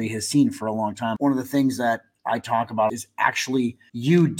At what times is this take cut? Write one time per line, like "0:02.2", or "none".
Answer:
0:01.1
0:03.4

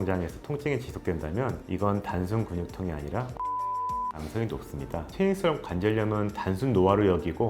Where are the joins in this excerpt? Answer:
0:05.0

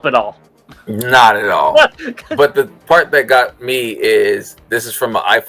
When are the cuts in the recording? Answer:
0:02.1

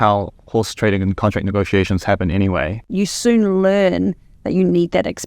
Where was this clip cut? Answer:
0:02.8

